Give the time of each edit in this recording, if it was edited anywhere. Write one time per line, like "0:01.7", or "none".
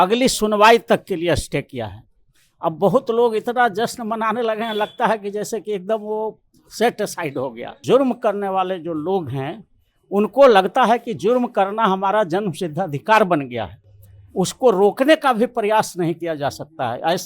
0:07.8